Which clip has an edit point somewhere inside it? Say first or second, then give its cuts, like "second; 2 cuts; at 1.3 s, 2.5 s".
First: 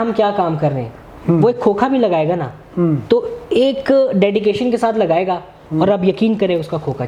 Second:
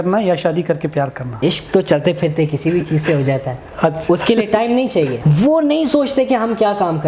second; 2 cuts; at 1.3 s, 5.2 s